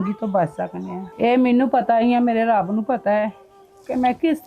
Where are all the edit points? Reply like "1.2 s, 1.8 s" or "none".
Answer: 1.0 s